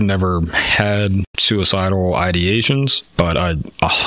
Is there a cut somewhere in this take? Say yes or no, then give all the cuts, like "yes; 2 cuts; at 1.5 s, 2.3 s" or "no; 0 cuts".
yes; 2 cuts; at 1.3 s, 3.0 s